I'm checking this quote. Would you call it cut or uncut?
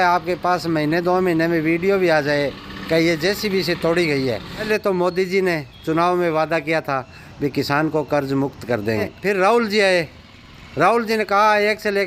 cut